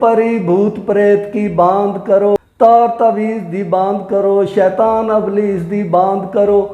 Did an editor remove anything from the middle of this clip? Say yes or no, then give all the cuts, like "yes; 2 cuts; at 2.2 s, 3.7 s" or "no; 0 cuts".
yes; 1 cut; at 2.4 s